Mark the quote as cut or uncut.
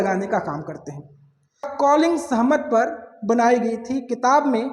cut